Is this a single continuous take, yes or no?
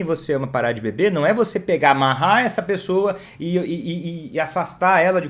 yes